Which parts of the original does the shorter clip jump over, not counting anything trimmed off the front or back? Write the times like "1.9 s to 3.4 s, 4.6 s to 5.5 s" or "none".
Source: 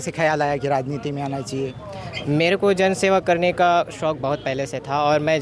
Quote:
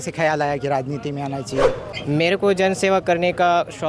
1.9 s to 2.1 s

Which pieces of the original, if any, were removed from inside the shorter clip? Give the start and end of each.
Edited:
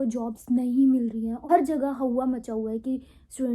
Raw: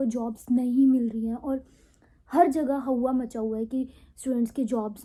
1.4 s to 2.3 s

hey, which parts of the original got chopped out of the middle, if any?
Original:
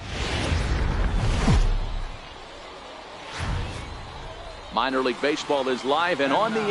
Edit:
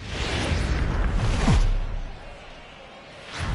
none

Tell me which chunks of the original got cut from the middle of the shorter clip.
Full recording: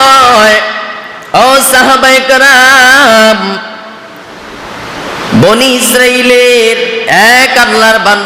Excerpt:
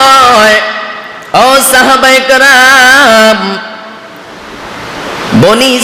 none

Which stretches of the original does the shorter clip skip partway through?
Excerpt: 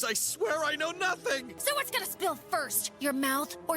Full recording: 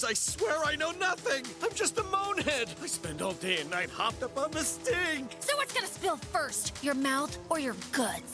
1.5 s to 5.3 s

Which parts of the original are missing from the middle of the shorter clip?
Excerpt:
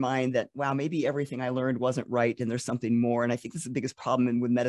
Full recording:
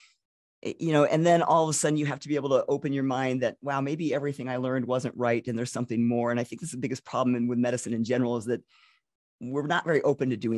none

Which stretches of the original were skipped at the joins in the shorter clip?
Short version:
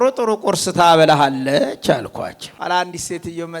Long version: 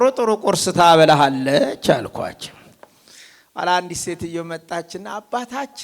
2.5 s to 3.4 s

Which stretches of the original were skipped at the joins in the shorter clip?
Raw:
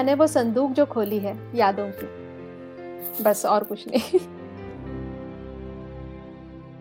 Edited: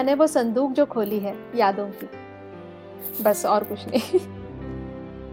4.3 s to 4.5 s

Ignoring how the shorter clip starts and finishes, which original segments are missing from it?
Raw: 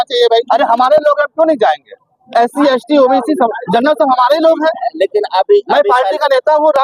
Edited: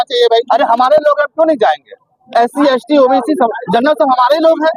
none

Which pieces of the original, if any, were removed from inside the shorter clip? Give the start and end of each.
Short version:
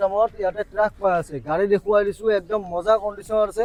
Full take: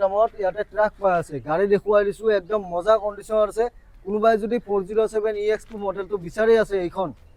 none

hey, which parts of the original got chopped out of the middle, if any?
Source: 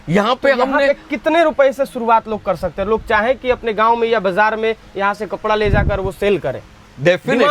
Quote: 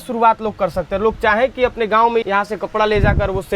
4.1 s to 4.9 s

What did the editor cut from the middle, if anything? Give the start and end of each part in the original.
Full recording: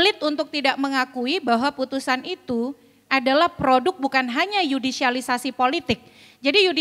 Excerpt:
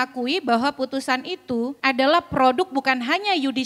2.7 s to 3.0 s

